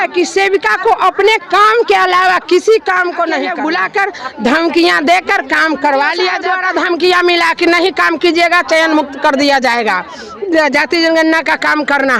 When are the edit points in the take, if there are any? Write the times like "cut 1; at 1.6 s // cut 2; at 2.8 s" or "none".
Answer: cut 1; at 3.5 s // cut 2; at 6.4 s